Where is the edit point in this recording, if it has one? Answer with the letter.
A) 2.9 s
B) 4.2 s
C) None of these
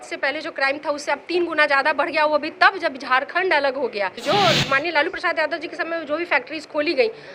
B